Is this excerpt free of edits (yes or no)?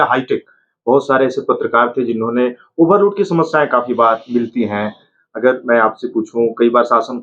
yes